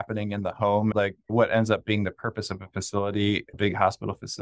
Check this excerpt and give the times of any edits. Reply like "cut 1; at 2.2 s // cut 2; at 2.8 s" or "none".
cut 1; at 0.9 s

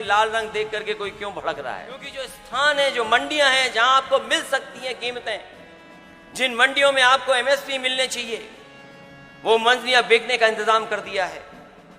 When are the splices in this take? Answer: cut 1; at 2.4 s

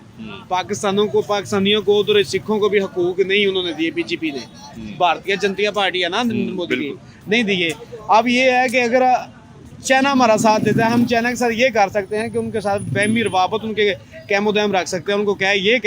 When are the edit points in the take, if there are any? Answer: none

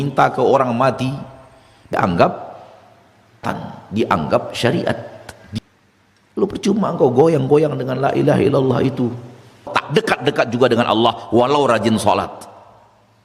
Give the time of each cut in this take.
cut 1; at 1.9 s // cut 2; at 3.4 s // cut 3; at 5.6 s // cut 4; at 9.8 s

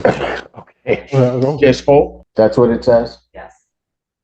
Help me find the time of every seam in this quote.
cut 1; at 2.2 s

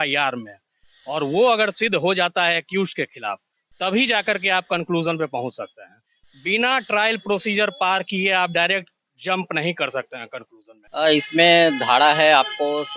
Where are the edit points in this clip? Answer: cut 1; at 10.9 s

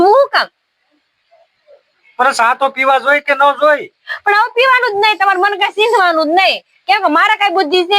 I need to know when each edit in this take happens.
none

